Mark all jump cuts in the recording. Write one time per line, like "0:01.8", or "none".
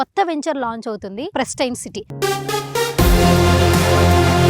0:01.3